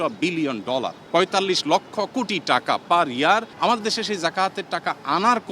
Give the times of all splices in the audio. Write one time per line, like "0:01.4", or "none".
0:01.0
0:03.5